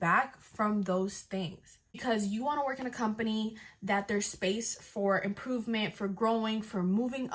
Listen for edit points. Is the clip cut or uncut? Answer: cut